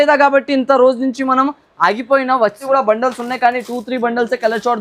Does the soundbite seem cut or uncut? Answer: cut